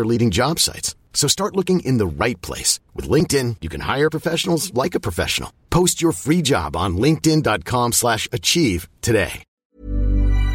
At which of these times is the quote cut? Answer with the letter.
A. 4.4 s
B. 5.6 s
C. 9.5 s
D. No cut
C